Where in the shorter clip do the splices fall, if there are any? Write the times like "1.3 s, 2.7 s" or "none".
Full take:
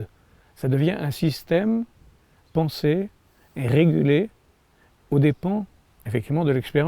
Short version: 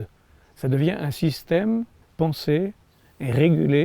2.0 s